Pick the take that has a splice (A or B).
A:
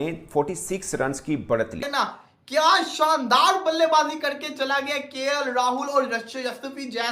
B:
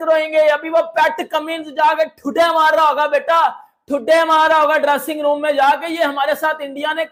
A